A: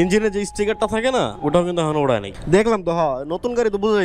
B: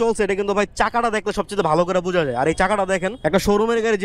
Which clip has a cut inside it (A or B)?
A